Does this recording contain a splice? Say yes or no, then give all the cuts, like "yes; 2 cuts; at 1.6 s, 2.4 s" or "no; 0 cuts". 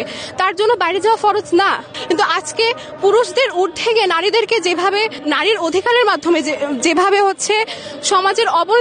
yes; 2 cuts; at 1.9 s, 5.2 s